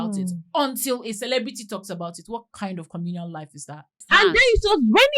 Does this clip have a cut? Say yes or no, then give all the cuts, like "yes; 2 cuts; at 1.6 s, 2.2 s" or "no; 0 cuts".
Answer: yes; 1 cut; at 4.0 s